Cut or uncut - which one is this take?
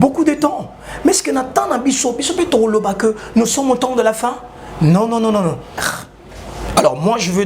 cut